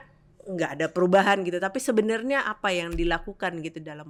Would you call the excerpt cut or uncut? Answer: uncut